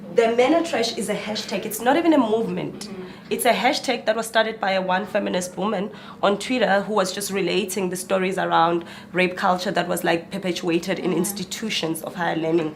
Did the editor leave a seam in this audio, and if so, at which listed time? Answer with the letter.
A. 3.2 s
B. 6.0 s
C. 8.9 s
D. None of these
D